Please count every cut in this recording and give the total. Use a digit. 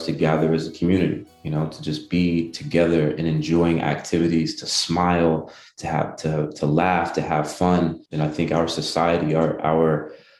1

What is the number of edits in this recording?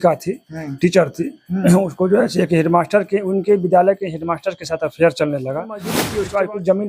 1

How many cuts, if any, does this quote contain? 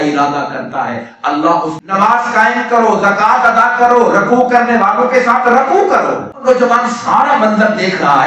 2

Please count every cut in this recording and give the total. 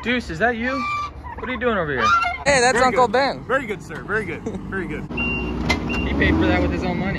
2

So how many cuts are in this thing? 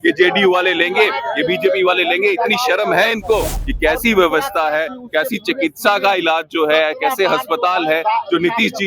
1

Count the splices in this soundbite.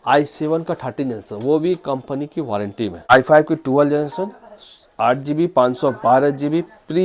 1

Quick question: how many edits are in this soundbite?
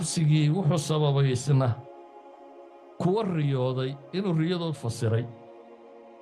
1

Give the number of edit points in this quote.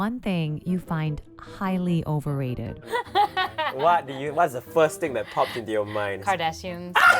1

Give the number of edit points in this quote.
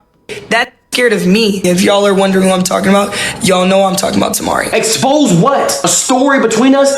2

